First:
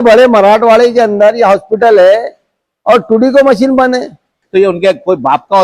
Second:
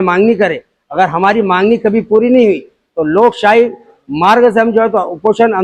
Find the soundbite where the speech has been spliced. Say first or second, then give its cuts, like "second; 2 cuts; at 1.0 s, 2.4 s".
first; 1 cut; at 4.3 s